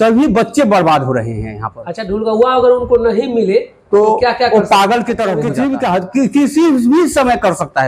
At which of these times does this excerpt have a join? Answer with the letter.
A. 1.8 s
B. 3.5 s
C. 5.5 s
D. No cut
C